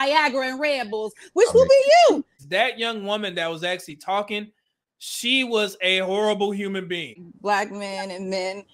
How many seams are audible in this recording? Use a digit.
2